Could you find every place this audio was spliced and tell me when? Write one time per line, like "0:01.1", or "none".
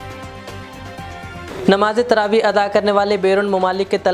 0:01.5